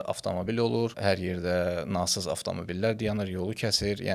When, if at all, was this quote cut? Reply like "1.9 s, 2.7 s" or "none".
1.0 s